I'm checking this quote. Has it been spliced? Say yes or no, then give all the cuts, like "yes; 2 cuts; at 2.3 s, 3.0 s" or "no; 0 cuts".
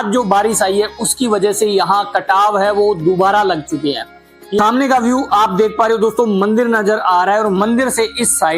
yes; 1 cut; at 4.6 s